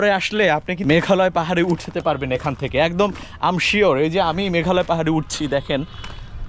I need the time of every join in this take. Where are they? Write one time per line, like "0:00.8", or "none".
none